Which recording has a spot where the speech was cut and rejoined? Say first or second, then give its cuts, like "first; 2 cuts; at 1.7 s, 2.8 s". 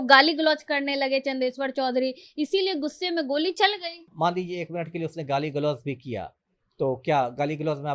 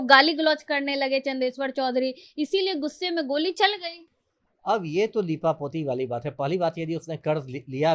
first; 1 cut; at 4.1 s